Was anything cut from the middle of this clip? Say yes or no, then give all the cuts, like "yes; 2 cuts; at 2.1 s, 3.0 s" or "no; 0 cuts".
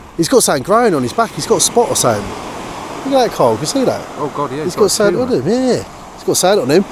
no; 0 cuts